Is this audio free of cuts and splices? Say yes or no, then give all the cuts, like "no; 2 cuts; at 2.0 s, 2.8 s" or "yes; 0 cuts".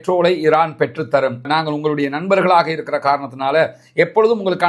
yes; 0 cuts